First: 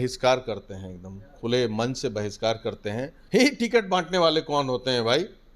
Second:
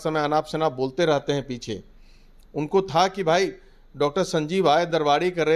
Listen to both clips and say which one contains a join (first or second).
first